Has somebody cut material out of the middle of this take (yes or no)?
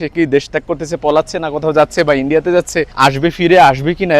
yes